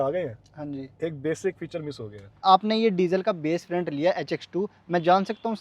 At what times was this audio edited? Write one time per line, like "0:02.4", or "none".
0:02.4